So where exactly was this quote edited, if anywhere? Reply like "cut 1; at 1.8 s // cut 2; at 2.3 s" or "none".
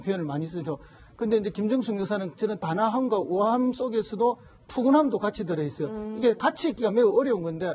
cut 1; at 3.6 s